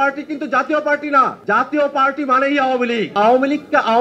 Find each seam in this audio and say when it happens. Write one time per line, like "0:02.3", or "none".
0:01.4
0:03.1